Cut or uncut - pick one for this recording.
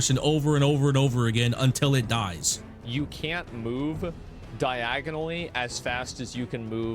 cut